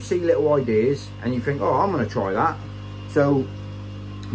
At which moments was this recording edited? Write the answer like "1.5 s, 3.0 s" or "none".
none